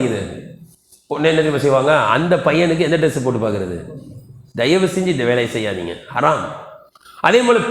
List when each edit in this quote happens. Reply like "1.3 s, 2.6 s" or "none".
none